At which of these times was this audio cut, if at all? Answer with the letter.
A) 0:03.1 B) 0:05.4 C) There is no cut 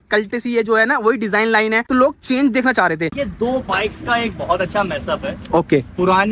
A